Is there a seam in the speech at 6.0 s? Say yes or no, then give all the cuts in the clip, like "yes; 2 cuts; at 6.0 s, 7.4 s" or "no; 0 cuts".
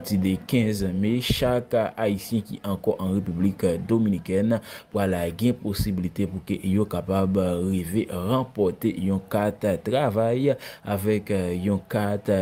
yes; 1 cut; at 6.0 s